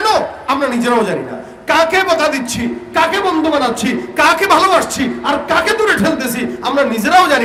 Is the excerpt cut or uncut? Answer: uncut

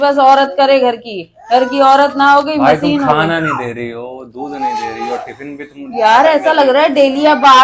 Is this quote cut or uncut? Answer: uncut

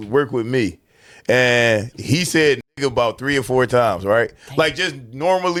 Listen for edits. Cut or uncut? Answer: uncut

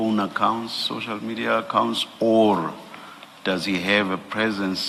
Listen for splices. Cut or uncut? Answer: uncut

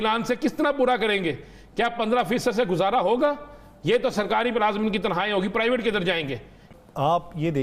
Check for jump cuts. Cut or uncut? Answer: cut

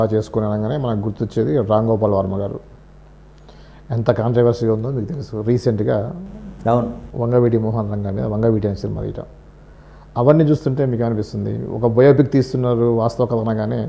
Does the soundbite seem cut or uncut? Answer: uncut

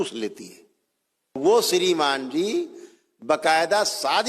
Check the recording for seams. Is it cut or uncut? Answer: cut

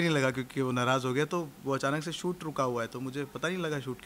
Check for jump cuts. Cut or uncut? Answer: uncut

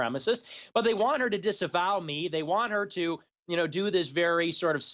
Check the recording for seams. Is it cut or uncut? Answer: uncut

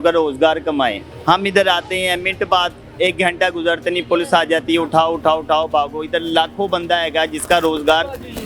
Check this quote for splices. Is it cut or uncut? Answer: uncut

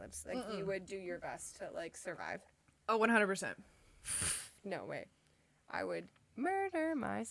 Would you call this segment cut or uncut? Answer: uncut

